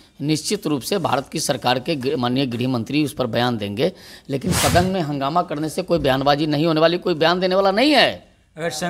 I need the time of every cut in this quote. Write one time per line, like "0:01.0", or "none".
none